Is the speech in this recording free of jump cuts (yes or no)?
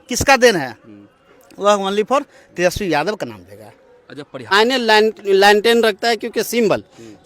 no